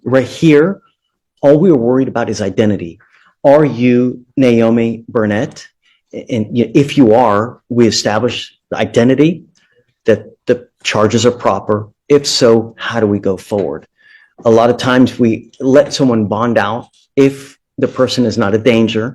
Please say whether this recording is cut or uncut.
uncut